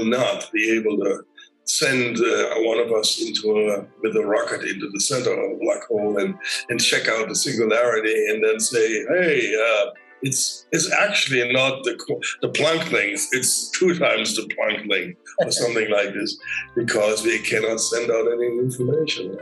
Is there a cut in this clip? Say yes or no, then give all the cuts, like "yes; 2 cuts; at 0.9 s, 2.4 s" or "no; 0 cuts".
no; 0 cuts